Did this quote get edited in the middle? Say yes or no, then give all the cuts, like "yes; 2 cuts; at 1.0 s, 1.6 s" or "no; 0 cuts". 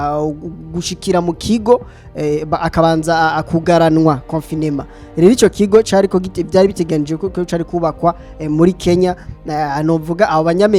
no; 0 cuts